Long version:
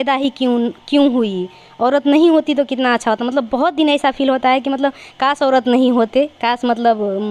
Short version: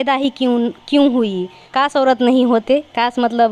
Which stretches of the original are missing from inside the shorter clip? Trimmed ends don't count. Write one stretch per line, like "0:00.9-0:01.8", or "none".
0:01.6-0:05.1